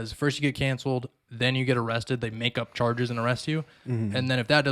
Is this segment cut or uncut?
uncut